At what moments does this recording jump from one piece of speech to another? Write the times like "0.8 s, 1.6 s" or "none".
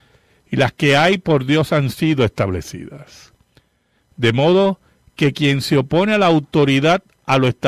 5.9 s